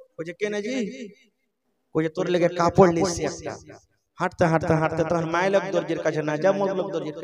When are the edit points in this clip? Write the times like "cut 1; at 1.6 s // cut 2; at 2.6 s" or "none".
none